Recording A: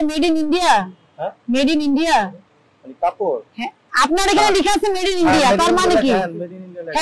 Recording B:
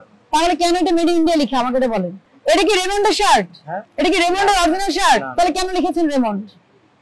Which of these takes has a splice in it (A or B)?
B